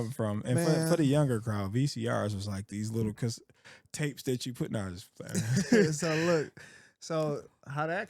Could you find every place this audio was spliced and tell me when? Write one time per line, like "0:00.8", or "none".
none

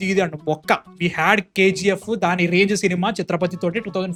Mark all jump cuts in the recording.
none

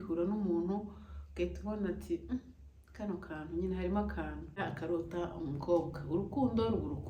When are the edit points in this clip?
0:04.6

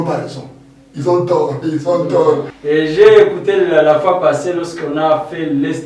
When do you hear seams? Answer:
0:02.5

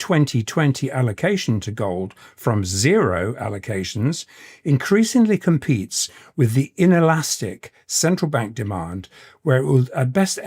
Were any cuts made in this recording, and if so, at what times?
none

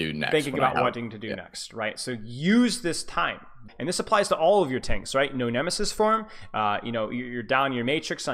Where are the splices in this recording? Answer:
0:03.7

